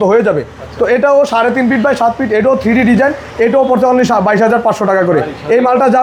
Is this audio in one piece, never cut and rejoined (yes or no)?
yes